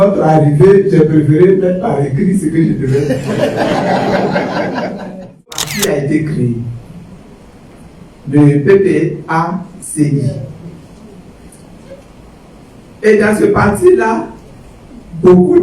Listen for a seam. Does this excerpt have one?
yes; 1 cut; at 5.7 s

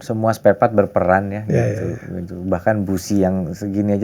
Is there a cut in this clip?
no; 0 cuts

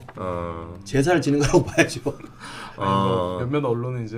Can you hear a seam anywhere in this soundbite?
no; 0 cuts

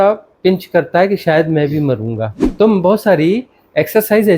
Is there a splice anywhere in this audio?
yes; 1 cut; at 2.4 s

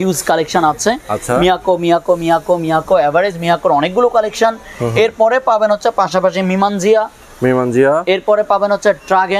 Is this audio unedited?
yes; 0 cuts

